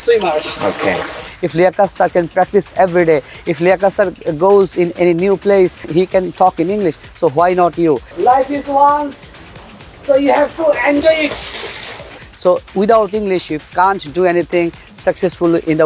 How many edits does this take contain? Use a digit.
3